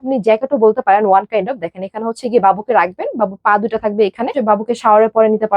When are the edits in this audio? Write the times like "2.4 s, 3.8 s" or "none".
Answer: 4.4 s

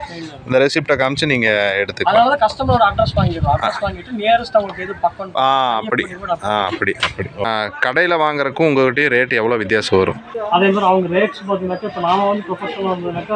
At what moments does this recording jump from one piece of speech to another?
7.4 s, 10.3 s

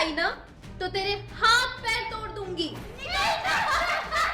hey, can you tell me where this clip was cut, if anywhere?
2.9 s

